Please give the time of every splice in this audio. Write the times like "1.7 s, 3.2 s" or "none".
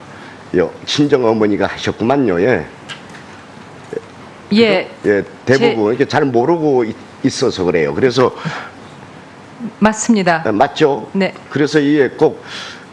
none